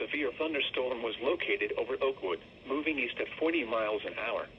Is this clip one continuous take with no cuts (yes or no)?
no